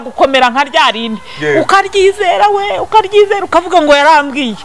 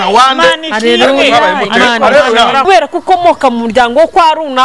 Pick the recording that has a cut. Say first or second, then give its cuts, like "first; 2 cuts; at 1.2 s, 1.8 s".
second; 1 cut; at 2.6 s